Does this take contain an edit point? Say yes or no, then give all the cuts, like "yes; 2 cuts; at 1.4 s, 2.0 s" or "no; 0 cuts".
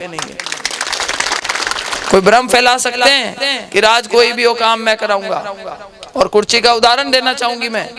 no; 0 cuts